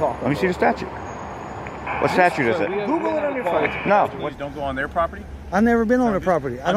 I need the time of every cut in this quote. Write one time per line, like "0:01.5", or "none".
0:04.3